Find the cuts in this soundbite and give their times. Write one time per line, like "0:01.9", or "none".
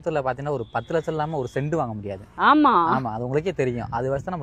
none

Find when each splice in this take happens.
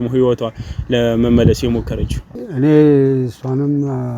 0:02.4

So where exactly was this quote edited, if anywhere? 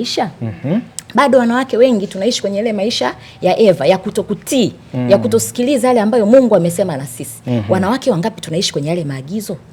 none

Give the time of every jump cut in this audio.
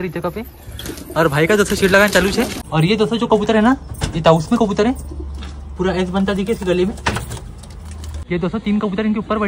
0:02.6
0:08.2

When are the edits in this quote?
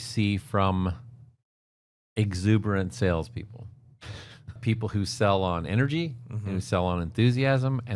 0:04.6

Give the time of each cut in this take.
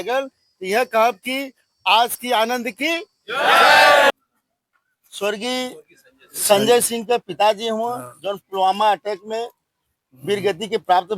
0:04.1

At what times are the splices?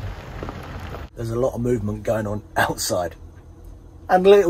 0:01.1

